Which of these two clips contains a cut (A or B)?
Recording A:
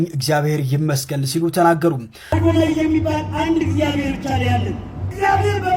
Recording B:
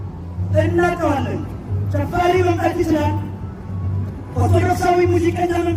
A